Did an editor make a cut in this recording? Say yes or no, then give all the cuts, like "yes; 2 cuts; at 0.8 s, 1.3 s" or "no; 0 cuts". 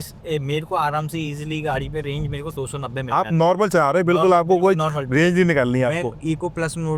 no; 0 cuts